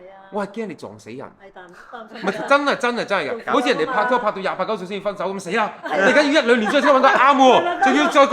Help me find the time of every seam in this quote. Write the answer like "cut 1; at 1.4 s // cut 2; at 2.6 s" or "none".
cut 1; at 3.4 s